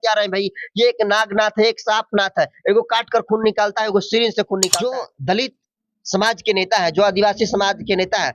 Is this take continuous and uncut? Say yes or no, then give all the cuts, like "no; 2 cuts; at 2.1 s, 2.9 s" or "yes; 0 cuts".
no; 1 cut; at 4.7 s